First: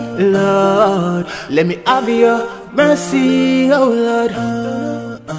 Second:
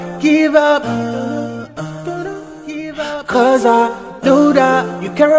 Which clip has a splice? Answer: first; 1 cut; at 4.5 s

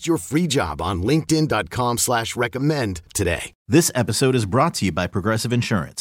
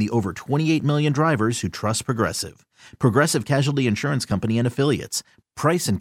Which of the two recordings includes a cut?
first; 1 cut; at 3.5 s

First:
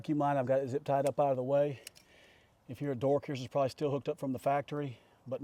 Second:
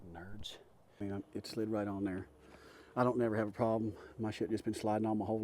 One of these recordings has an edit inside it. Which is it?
second; 1 cut; at 1.0 s

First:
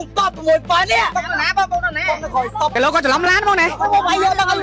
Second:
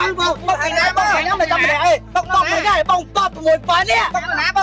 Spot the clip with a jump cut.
first; 1 cut; at 2.7 s

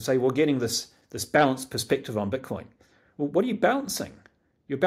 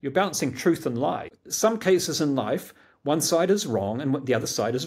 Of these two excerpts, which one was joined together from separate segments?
second; 1 cut; at 1.4 s

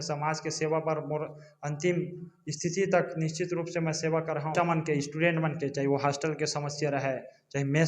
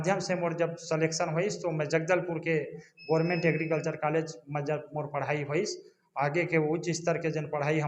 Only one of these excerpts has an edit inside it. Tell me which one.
first; 1 cut; at 4.5 s

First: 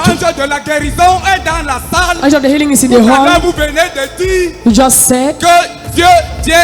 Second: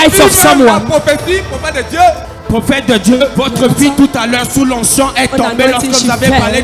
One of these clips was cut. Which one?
second; 2 cuts; at 2.3 s, 3.3 s

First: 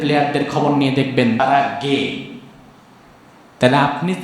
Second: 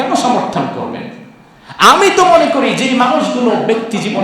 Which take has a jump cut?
first; 1 cut; at 1.4 s

